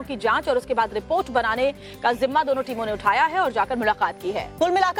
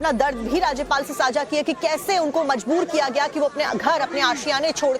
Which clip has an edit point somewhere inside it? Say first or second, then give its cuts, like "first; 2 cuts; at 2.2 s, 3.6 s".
second; 1 cut; at 1.2 s